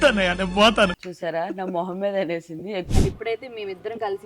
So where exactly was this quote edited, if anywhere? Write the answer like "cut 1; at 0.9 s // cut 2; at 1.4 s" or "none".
cut 1; at 2.9 s